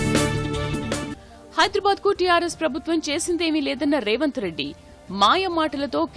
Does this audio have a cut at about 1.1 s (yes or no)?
yes